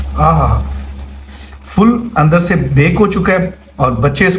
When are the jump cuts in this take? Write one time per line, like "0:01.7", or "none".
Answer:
none